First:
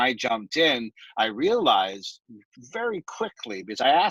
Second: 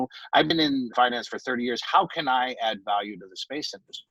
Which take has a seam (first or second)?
second